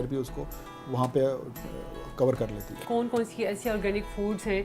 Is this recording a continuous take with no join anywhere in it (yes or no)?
no